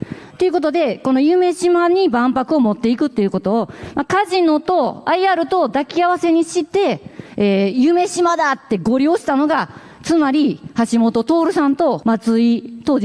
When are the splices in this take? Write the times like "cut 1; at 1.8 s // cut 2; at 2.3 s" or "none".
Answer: cut 1; at 12.0 s

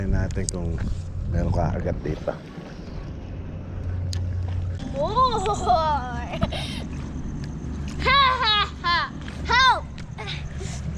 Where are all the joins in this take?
cut 1; at 4.8 s

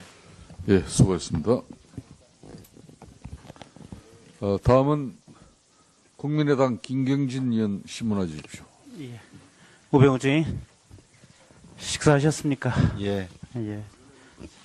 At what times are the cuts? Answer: none

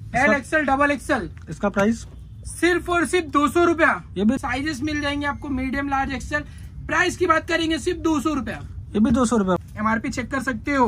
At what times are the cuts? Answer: cut 1; at 4.3 s // cut 2; at 9.6 s

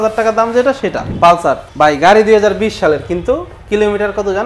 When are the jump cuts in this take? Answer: cut 1; at 1.1 s // cut 2; at 1.7 s

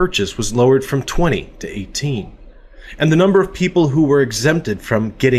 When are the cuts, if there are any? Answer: none

